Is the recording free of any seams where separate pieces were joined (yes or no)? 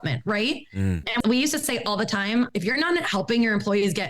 no